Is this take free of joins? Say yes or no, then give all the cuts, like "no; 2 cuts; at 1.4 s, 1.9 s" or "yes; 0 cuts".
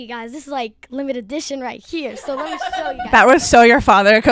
yes; 0 cuts